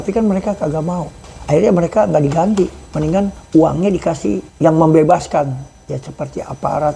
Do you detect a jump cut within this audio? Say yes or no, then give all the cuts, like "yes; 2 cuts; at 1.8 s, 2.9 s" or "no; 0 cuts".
yes; 3 cuts; at 1.2 s, 3.4 s, 4.5 s